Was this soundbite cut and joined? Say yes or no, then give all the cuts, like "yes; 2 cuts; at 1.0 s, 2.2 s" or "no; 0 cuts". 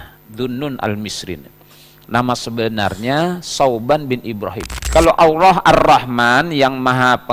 yes; 1 cut; at 4.7 s